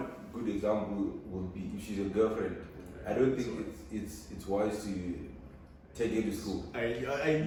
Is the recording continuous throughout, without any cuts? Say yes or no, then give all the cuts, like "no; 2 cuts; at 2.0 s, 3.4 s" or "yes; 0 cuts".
yes; 0 cuts